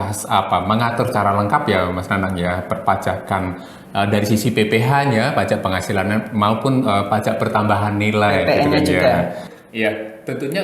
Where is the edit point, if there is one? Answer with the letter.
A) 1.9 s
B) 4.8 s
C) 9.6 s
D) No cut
C